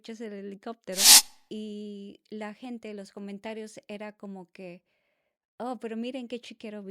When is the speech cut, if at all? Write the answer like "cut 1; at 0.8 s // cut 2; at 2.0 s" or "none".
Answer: cut 1; at 1.3 s